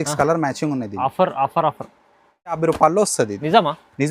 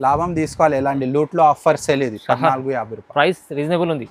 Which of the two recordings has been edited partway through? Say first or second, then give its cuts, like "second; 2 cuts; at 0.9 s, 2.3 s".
first; 1 cut; at 2.6 s